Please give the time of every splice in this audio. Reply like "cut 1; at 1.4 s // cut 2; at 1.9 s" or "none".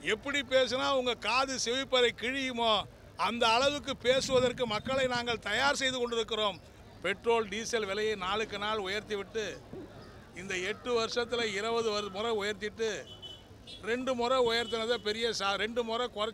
cut 1; at 6.7 s